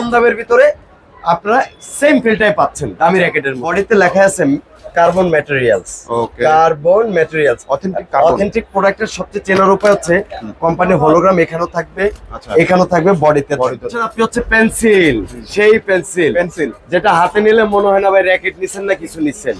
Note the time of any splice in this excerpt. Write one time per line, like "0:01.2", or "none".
0:03.6
0:14.0